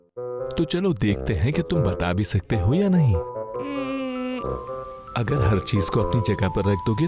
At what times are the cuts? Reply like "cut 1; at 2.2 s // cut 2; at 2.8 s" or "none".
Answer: cut 1; at 4.5 s